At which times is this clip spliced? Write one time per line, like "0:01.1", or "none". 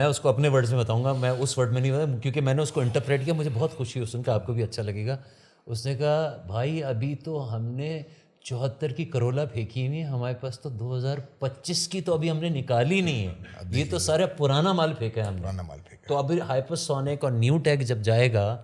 none